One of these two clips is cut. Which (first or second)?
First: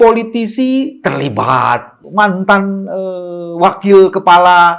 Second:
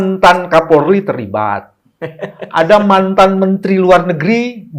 first